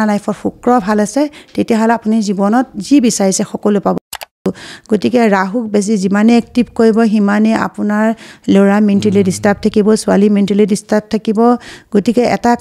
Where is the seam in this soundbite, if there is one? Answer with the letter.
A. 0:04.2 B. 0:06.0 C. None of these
A